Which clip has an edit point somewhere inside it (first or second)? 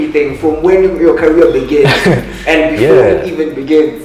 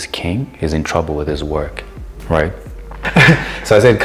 second